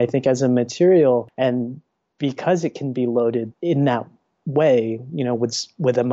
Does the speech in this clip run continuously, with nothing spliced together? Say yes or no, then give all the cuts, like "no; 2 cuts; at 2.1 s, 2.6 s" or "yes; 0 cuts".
no; 2 cuts; at 1.3 s, 3.5 s